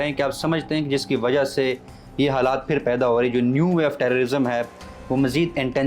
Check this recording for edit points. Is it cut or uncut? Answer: uncut